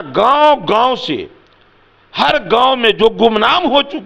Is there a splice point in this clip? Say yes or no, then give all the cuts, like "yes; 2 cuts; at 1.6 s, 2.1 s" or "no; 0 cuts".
no; 0 cuts